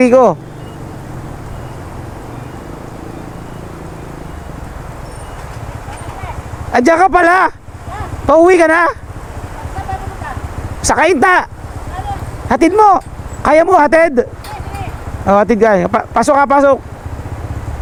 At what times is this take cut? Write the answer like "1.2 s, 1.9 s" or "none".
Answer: none